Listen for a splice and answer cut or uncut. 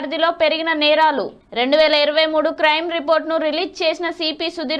uncut